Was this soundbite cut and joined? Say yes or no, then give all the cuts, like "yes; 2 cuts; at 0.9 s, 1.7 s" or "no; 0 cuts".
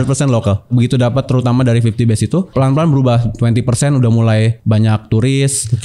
yes; 3 cuts; at 0.7 s, 2.5 s, 4.6 s